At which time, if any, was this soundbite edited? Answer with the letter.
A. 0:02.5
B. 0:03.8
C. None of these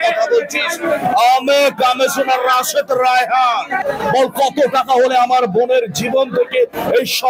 B